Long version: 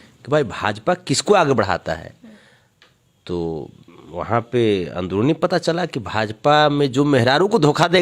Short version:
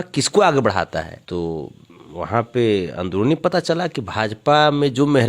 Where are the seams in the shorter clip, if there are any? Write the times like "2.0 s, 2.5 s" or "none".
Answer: 1.2 s